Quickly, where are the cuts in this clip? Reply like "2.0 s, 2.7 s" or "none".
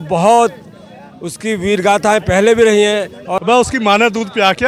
3.2 s